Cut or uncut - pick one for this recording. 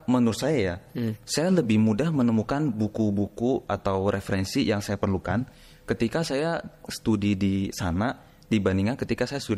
uncut